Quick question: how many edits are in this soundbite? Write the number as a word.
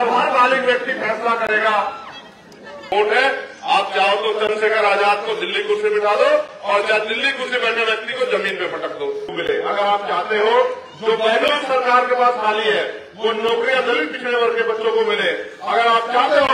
two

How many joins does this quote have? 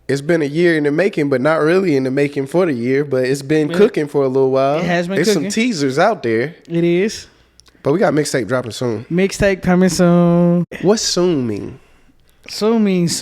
one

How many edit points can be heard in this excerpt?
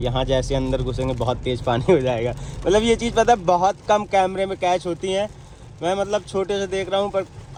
zero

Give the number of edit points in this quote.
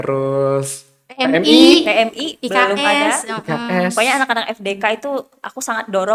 zero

